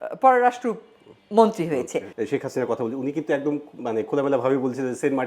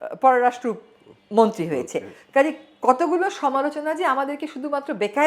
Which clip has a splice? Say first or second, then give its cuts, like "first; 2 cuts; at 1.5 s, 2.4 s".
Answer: first; 1 cut; at 2.1 s